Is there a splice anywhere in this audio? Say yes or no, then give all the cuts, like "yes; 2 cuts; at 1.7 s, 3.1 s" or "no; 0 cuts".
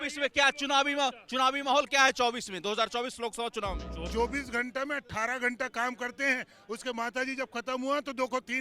yes; 1 cut; at 4.1 s